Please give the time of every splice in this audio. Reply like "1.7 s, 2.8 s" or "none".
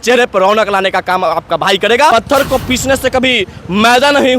2.1 s